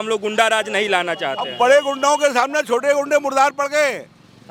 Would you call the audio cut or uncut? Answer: uncut